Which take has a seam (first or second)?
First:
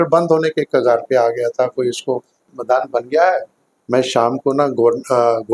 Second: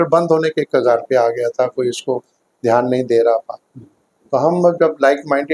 first